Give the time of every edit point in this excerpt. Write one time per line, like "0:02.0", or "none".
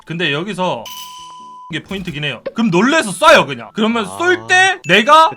0:02.5